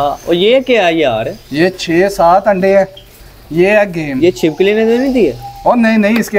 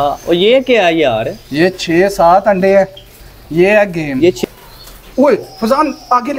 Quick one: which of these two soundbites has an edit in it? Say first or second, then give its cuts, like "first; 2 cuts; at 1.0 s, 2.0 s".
second; 1 cut; at 4.4 s